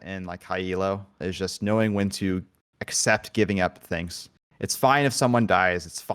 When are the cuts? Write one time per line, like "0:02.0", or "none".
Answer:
0:01.2